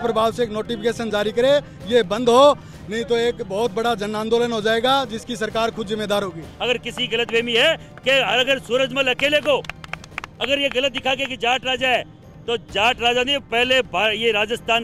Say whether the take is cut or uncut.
cut